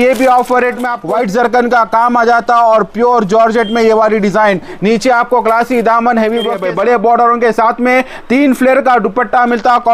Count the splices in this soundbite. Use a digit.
2